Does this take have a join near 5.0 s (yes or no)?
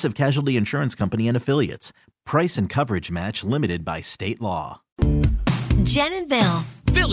yes